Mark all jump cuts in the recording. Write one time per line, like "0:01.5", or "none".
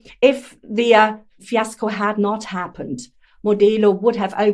0:01.3